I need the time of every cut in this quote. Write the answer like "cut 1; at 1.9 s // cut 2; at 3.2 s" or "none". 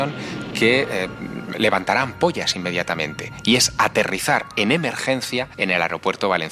cut 1; at 5.5 s